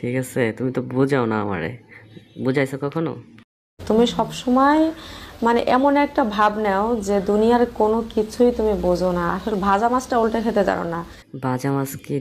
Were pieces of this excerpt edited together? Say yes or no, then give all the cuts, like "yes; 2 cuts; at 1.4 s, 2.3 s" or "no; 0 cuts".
no; 0 cuts